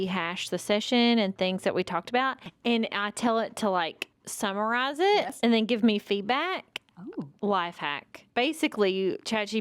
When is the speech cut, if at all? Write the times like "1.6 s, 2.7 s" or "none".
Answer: 8.2 s